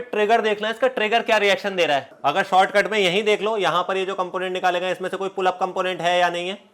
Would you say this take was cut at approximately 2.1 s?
yes; 1 cut; at 2.1 s

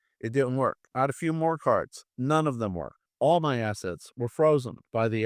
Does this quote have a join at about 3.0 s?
yes; 1 cut; at 3.0 s

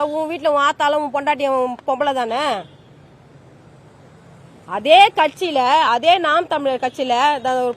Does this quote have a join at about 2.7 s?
no; 0 cuts

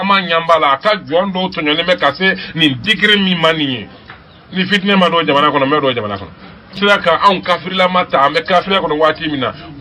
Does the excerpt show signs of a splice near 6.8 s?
yes; 1 cut; at 6.8 s

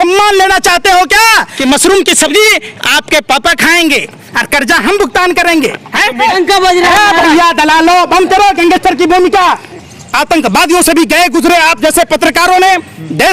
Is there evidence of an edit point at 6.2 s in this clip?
yes; 3 cuts; at 1.5 s, 6.2 s, 9.7 s

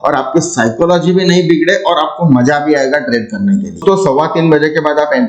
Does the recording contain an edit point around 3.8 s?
yes; 1 cut; at 3.8 s

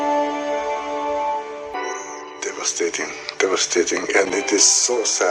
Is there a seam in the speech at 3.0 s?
no; 1 cut; at 1.7 s

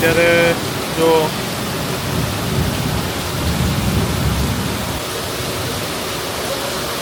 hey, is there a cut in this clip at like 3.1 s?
no; 0 cuts

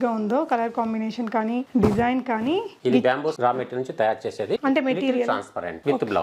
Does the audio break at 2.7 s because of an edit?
yes; 1 cut; at 2.7 s

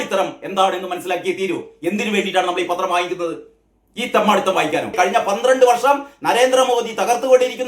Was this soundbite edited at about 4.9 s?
yes; 1 cut; at 4.9 s

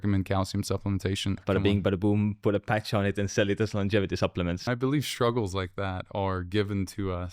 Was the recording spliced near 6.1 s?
no; 2 cuts; at 1.4 s, 4.6 s

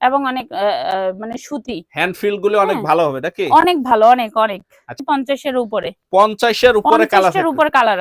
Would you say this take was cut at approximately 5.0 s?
yes; 1 cut; at 5.0 s

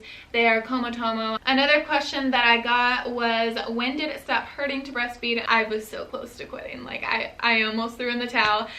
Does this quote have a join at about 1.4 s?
yes; 2 cuts; at 1.4 s, 5.4 s

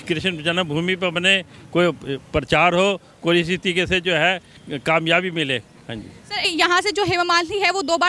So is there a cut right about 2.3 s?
no; 1 cut; at 6.5 s

